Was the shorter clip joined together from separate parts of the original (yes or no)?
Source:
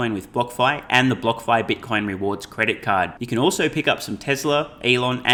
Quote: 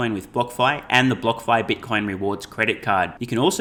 no